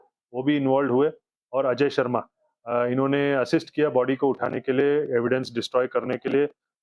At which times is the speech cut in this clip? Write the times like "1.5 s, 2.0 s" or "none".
none